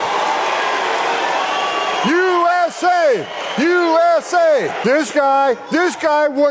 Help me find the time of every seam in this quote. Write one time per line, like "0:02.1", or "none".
0:04.8